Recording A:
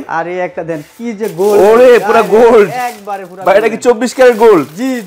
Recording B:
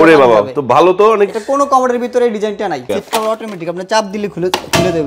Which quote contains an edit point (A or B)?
B